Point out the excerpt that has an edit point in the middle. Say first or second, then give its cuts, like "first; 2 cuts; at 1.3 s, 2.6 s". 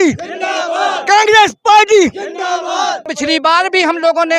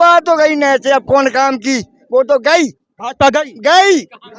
first; 1 cut; at 3.0 s